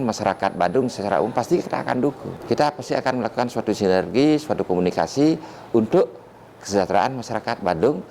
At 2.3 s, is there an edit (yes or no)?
yes